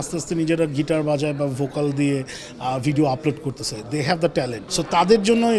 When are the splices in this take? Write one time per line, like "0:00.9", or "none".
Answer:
0:04.6